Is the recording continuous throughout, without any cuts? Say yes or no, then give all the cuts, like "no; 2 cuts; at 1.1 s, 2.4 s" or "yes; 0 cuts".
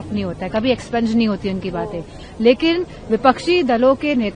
yes; 0 cuts